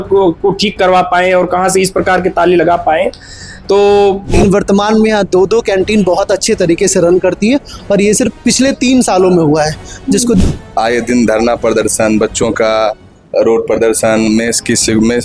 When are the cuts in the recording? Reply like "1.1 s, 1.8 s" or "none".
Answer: 4.4 s, 10.4 s